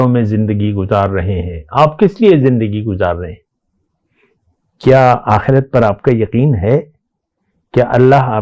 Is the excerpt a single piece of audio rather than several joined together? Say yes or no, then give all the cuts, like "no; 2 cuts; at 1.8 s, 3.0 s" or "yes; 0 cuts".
yes; 0 cuts